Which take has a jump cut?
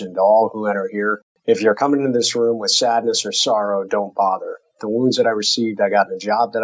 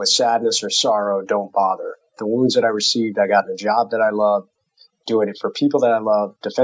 first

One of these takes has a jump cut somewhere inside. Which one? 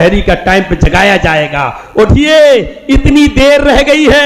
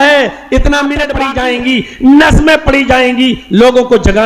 second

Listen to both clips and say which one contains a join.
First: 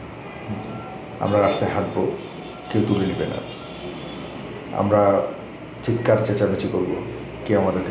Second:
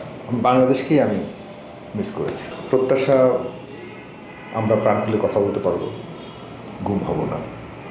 second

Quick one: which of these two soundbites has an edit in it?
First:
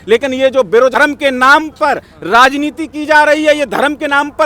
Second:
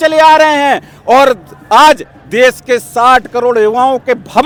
first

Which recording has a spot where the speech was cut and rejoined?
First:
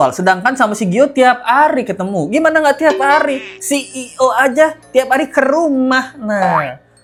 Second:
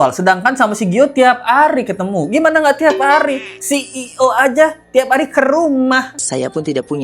second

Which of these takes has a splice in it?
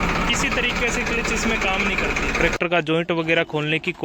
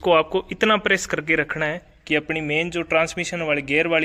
first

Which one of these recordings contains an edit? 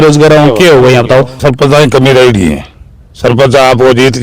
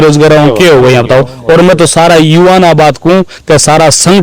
first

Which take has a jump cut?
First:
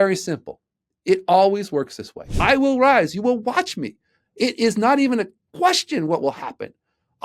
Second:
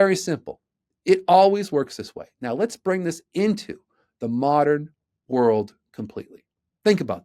first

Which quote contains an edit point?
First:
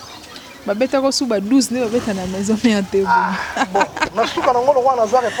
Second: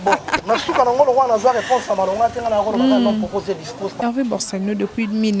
second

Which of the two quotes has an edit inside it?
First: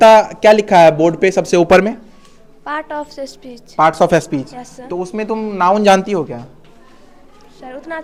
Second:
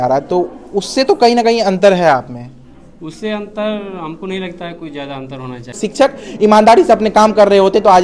second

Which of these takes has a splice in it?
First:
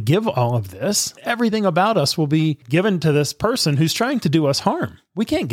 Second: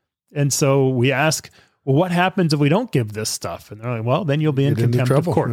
first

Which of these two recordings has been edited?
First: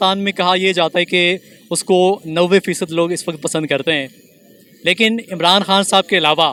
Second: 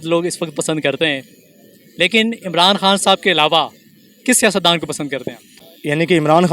second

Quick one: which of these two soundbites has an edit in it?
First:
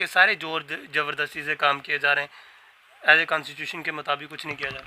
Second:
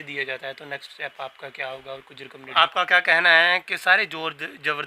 second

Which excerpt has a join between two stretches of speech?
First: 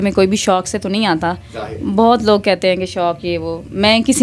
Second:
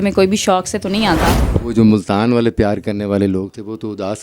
second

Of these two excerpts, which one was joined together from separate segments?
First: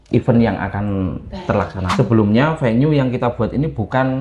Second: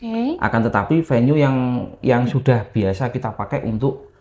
first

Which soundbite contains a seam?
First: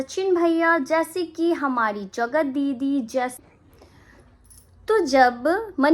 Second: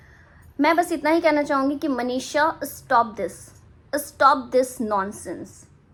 first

